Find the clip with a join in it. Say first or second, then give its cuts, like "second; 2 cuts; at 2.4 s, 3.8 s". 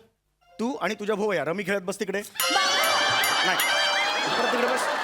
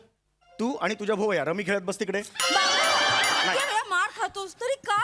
second; 1 cut; at 3.5 s